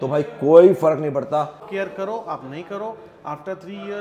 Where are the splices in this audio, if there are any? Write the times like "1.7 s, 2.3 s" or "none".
1.6 s